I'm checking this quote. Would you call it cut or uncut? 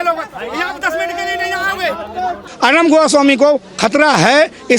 cut